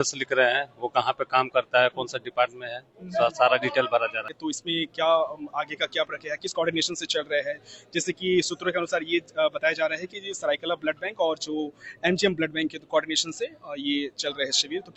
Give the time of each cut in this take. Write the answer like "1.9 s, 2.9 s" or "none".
4.3 s